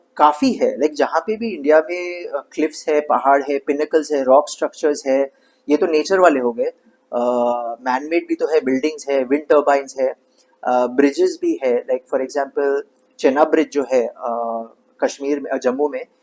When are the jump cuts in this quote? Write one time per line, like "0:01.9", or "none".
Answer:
none